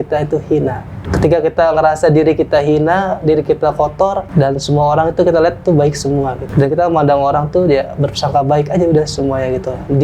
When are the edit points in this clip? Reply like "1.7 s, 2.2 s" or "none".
0.9 s, 4.3 s, 6.4 s